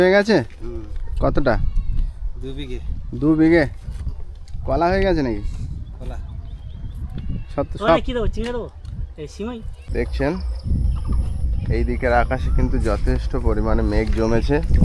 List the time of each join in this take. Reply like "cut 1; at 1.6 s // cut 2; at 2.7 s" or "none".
cut 1; at 9.7 s